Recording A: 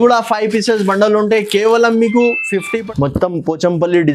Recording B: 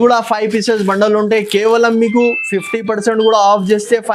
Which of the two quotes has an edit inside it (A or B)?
A